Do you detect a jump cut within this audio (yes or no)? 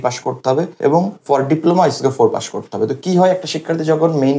yes